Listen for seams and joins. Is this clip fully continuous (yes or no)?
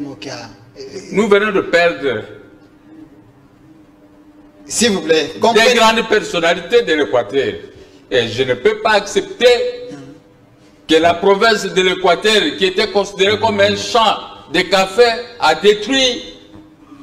yes